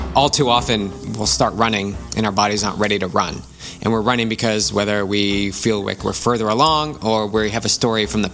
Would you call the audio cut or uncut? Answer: cut